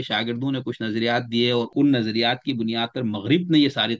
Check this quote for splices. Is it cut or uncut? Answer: cut